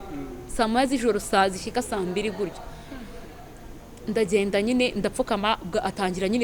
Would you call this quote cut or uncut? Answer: uncut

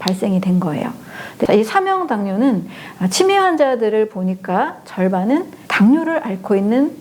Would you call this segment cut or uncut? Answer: cut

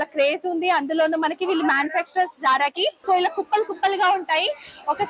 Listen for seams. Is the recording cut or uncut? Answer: cut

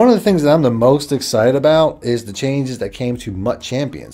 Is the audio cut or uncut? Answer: uncut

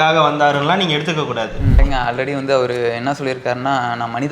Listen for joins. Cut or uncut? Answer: cut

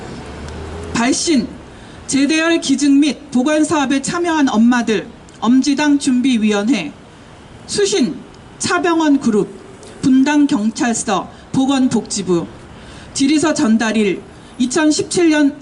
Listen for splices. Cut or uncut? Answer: cut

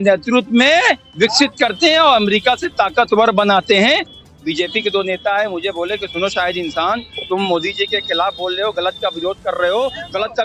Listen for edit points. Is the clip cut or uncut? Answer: cut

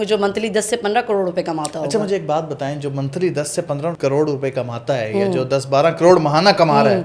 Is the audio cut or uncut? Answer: uncut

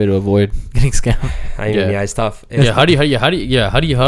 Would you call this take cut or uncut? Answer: uncut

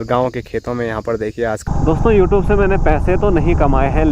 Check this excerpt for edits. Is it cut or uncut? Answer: cut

